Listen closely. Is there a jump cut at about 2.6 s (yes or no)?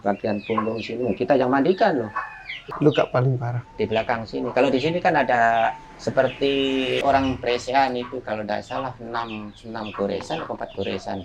yes